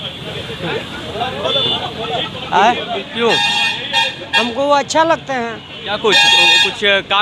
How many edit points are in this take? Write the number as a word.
zero